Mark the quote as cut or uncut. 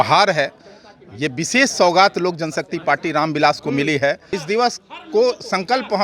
cut